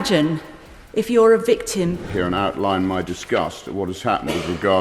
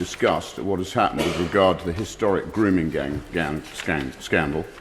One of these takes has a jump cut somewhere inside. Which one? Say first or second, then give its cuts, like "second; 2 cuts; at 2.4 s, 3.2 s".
first; 1 cut; at 2.0 s